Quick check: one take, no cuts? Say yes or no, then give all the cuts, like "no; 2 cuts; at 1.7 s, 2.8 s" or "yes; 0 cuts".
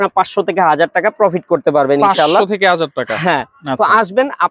yes; 0 cuts